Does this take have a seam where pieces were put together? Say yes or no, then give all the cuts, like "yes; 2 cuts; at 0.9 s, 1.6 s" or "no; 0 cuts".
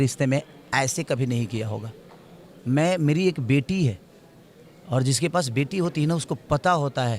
no; 0 cuts